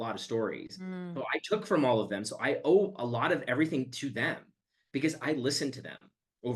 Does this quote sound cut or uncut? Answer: uncut